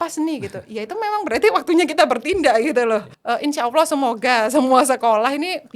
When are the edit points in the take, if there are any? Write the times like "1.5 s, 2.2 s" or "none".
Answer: 3.1 s